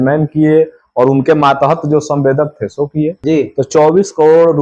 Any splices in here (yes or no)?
yes